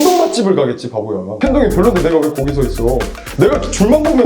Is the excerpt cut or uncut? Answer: uncut